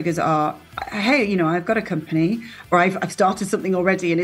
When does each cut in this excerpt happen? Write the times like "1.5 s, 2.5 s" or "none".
2.7 s